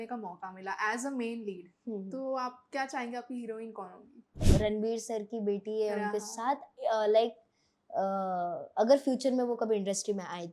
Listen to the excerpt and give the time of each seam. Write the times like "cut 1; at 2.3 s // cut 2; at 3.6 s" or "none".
cut 1; at 4.4 s